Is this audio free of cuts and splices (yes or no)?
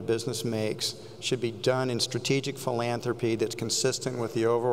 yes